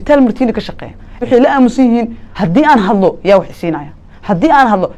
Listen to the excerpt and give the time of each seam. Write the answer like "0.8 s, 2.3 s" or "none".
1.2 s, 2.3 s